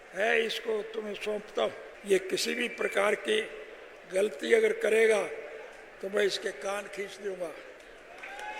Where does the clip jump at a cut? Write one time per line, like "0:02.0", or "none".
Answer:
0:01.9